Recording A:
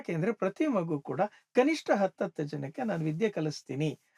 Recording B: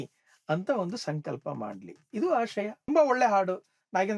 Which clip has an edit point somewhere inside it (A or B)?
B